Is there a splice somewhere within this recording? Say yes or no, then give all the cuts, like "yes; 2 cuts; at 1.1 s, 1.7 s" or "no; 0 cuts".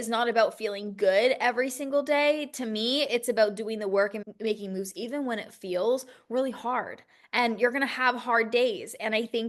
no; 0 cuts